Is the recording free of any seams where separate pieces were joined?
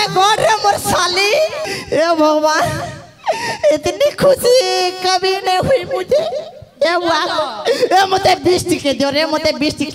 no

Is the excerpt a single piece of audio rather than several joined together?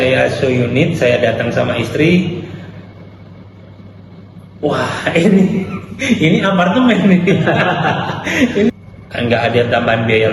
no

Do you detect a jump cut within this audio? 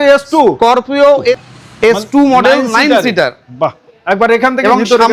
yes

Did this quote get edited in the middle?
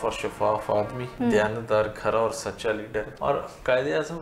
yes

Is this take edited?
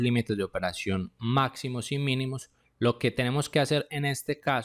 no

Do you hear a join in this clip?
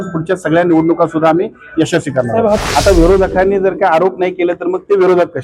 yes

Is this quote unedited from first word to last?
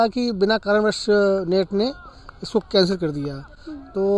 yes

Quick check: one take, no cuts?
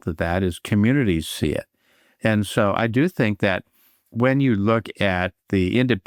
yes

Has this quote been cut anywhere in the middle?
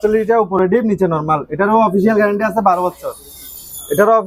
no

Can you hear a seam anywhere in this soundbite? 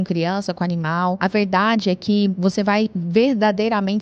yes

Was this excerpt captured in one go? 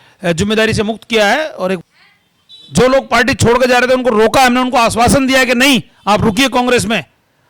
no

